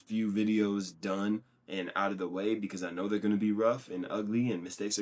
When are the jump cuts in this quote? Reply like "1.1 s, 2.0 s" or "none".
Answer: none